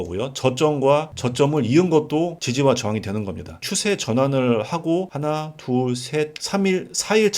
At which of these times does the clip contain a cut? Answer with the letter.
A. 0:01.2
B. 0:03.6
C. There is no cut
B